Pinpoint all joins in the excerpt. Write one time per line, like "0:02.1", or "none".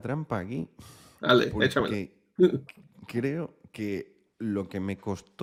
none